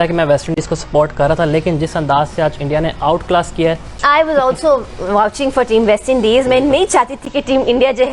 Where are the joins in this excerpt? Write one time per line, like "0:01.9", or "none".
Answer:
0:04.0